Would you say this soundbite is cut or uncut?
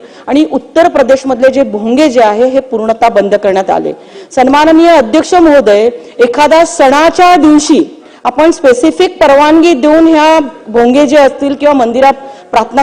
uncut